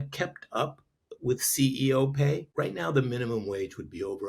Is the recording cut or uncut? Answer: cut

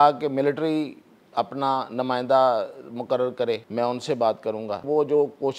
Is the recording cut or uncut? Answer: cut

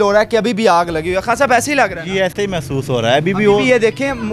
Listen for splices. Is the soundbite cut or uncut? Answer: uncut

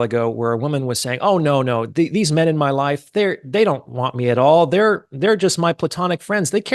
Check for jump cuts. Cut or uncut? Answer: uncut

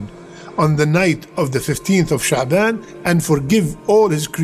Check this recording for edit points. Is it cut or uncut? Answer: uncut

